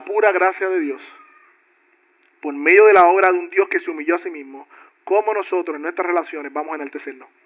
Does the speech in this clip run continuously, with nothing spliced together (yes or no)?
yes